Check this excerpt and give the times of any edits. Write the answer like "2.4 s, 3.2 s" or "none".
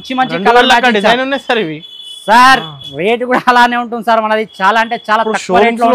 none